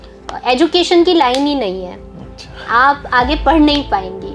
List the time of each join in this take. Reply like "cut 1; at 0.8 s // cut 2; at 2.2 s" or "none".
none